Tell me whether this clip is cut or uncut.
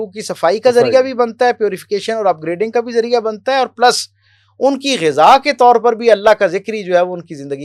uncut